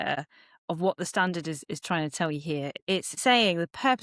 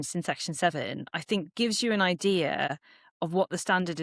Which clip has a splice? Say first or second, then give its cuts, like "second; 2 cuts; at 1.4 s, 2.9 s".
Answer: first; 1 cut; at 2.8 s